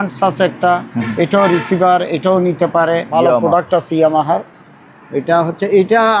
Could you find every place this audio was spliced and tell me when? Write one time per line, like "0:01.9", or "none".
0:03.1

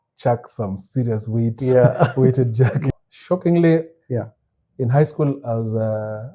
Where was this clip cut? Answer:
0:02.9

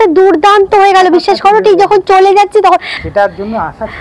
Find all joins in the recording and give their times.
0:02.9

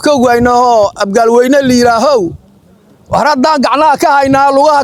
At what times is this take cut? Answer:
none

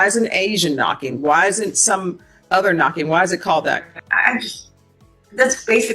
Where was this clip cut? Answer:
0:04.0

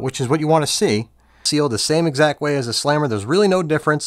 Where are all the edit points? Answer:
0:01.4

